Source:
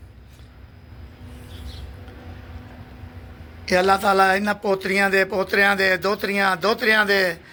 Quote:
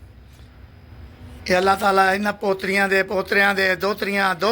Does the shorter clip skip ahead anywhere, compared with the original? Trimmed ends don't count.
yes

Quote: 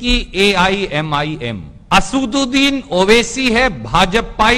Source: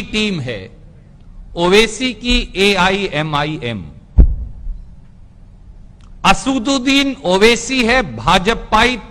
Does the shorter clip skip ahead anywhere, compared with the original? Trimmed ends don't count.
yes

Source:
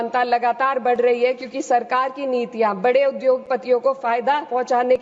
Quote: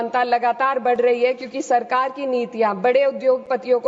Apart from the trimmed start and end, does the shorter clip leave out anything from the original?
no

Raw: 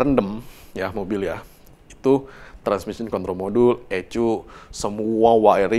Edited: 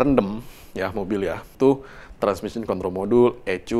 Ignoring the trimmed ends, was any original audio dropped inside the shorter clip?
yes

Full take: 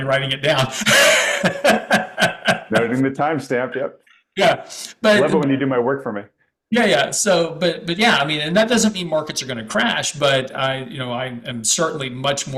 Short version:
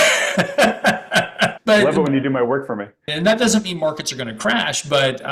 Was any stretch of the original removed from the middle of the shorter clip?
yes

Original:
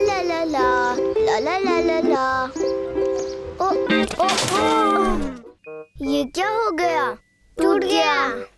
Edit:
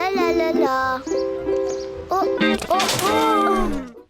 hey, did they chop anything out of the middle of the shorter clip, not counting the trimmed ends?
no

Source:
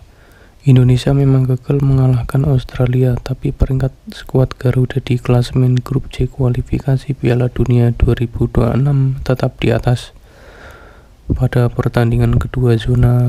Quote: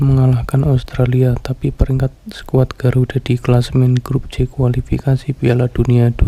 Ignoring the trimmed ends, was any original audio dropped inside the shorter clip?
no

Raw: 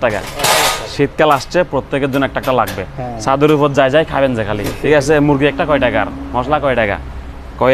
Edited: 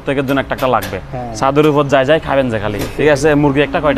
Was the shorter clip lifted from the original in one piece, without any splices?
yes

